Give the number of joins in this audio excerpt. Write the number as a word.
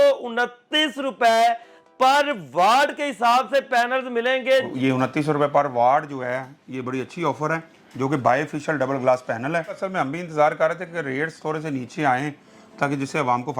two